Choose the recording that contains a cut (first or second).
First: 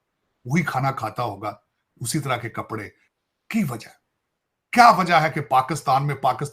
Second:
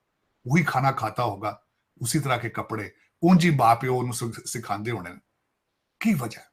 first